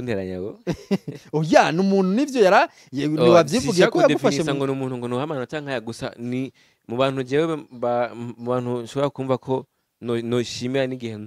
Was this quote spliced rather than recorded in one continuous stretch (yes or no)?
no